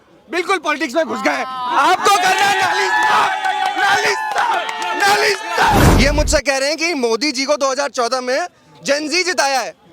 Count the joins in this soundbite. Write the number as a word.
one